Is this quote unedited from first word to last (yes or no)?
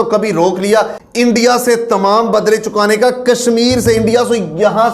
no